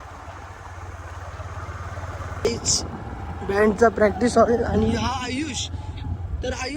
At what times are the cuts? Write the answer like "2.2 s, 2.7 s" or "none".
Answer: 2.4 s